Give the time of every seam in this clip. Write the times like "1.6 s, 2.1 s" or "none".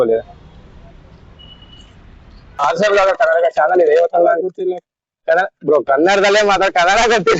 2.6 s